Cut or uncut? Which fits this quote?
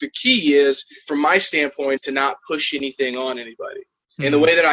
cut